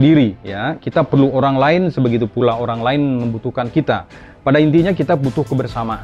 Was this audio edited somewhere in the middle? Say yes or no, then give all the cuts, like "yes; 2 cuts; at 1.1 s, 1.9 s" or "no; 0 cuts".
no; 0 cuts